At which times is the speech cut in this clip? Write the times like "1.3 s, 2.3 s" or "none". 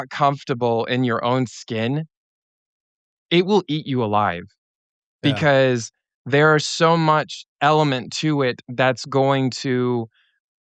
none